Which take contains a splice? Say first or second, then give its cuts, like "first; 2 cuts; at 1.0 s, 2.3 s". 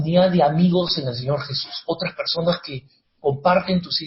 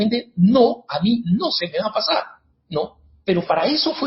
second; 1 cut; at 2.9 s